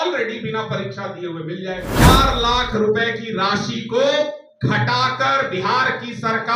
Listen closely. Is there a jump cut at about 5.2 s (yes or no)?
no